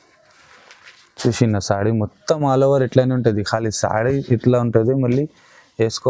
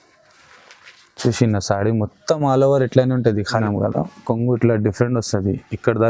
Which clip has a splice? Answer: second; 1 cut; at 3.6 s

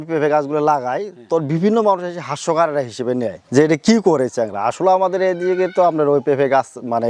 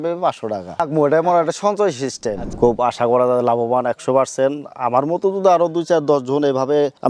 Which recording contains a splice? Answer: second; 2 cuts; at 0.9 s, 2.5 s

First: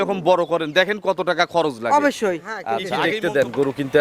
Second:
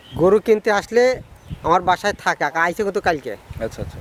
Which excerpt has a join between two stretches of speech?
first; 1 cut; at 2.9 s

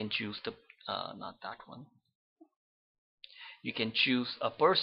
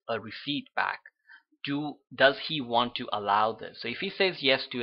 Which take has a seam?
first; 1 cut; at 1.2 s

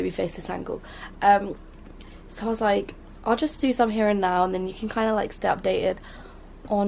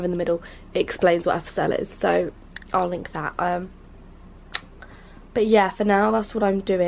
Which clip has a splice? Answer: second; 1 cut; at 2.2 s

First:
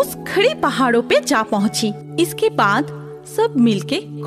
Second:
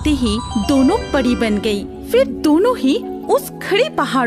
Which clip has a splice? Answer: first; 1 cut; at 2.0 s

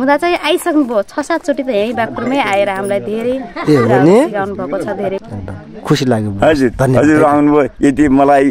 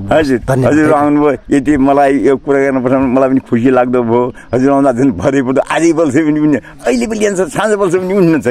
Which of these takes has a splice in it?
first; 1 cut; at 5.2 s

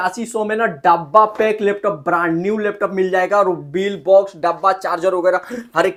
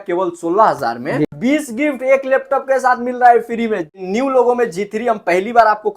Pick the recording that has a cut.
second; 2 cuts; at 1.2 s, 4.0 s

